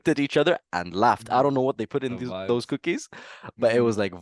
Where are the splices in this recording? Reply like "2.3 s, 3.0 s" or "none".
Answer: none